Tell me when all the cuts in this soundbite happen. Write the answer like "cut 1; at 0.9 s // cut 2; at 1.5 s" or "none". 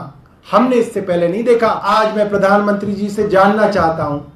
cut 1; at 1.8 s